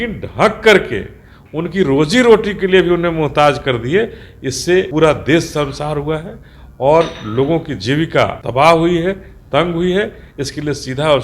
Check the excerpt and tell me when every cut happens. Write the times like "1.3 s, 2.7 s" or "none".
4.9 s, 8.4 s

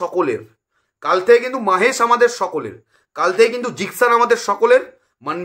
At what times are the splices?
none

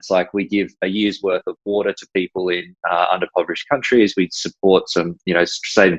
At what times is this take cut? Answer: none

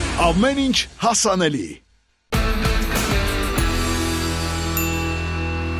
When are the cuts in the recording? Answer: 2.2 s

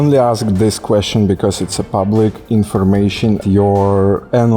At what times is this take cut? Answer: 3.4 s

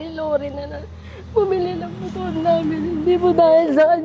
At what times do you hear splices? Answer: none

